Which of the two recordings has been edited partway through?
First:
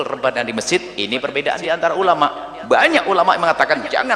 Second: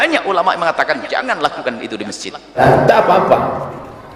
second; 1 cut; at 2.6 s

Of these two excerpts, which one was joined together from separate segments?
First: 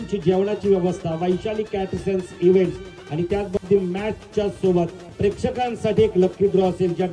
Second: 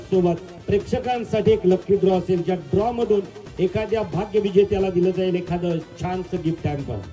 first; 1 cut; at 3.6 s

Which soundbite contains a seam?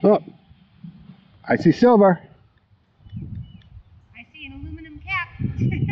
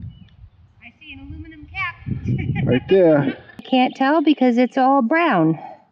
second; 1 cut; at 3.7 s

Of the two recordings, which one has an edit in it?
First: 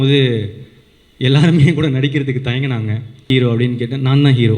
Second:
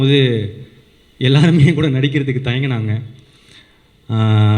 first; 1 cut; at 3.3 s

